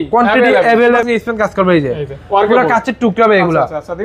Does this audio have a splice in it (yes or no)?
yes